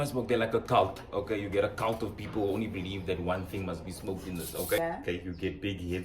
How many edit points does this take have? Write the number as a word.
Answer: one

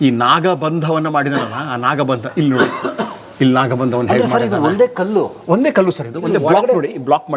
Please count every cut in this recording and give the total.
zero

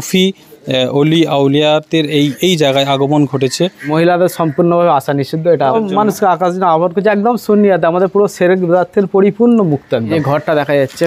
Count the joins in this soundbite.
three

